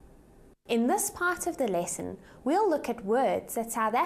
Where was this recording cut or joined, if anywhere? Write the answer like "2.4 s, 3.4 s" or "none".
none